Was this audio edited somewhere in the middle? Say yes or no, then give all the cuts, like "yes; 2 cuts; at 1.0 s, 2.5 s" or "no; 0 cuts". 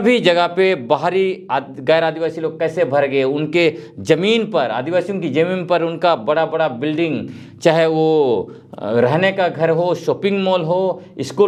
no; 0 cuts